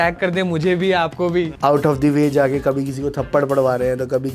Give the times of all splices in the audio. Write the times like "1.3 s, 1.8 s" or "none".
1.5 s